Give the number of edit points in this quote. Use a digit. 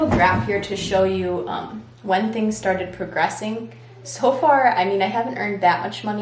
0